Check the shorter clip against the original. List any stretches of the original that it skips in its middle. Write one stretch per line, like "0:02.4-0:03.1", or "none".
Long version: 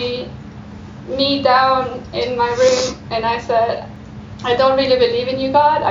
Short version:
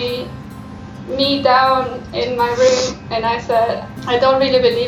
0:03.9-0:04.3